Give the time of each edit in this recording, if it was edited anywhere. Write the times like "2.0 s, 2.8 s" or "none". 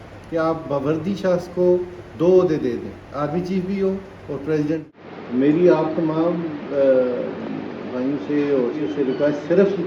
5.2 s, 8.8 s